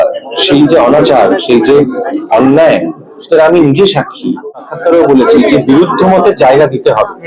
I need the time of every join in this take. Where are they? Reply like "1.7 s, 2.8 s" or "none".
4.5 s